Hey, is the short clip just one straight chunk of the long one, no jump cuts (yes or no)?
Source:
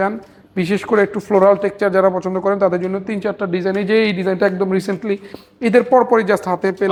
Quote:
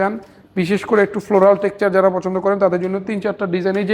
yes